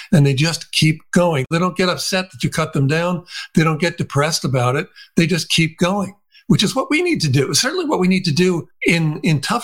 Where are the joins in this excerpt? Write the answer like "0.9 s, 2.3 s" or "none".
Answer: 1.5 s, 8.7 s

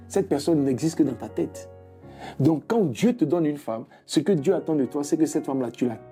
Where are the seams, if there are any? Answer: none

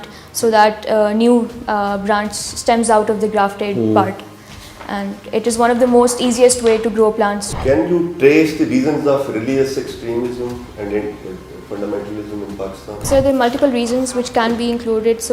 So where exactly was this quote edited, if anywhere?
7.5 s, 13.0 s

